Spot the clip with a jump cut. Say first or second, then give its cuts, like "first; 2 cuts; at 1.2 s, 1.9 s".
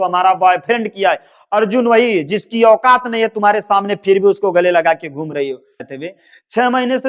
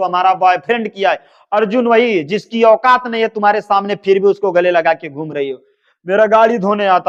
first; 1 cut; at 5.9 s